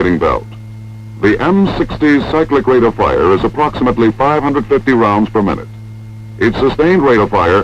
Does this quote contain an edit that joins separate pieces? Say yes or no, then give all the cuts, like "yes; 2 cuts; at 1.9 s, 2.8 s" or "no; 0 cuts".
yes; 1 cut; at 2.5 s